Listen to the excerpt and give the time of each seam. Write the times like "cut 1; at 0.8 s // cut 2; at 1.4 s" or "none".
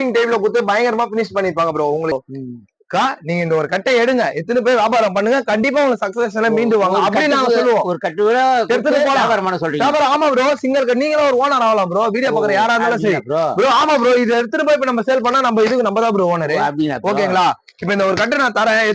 cut 1; at 2.1 s